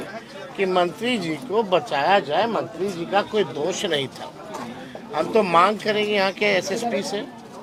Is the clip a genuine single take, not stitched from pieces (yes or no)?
yes